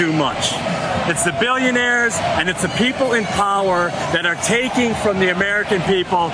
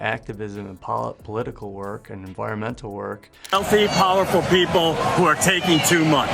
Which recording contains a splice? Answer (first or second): second